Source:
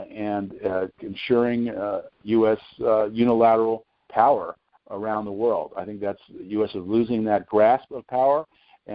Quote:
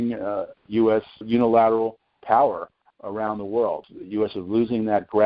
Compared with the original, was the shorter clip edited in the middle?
yes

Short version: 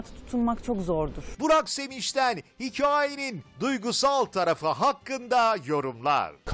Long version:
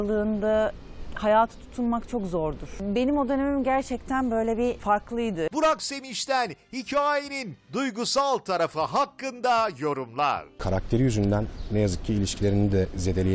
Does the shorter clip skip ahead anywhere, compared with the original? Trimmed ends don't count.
yes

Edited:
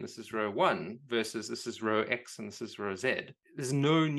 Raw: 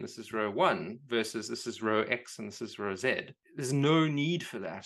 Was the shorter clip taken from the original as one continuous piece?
yes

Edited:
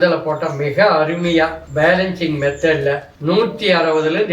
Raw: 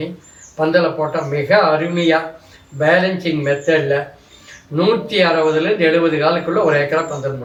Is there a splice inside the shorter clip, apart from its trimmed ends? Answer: yes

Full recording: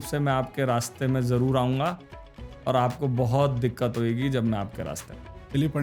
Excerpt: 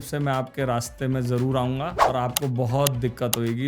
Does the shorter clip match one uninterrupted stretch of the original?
no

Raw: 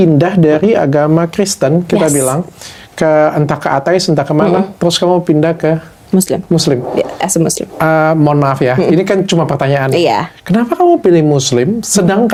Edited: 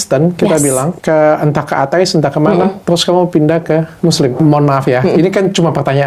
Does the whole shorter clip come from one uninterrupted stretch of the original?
no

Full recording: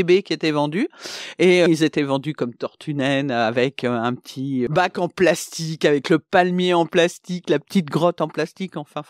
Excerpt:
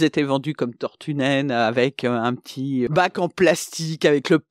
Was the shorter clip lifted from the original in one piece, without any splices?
yes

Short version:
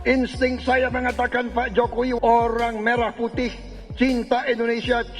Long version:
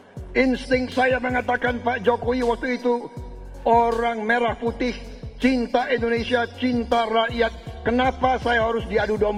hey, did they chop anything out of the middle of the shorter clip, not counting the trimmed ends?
yes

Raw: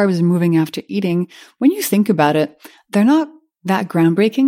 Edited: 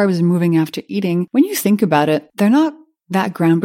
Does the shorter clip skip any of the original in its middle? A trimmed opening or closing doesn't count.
yes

